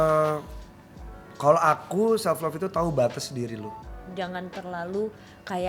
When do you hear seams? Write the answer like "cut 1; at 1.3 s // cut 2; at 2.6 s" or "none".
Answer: cut 1; at 4.0 s